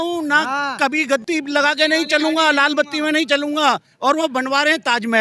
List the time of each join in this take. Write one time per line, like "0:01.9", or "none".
0:01.2